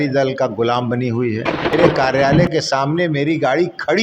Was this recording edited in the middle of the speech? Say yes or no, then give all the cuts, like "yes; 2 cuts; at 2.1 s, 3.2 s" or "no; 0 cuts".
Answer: yes; 1 cut; at 1.8 s